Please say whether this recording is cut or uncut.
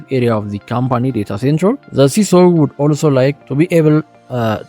cut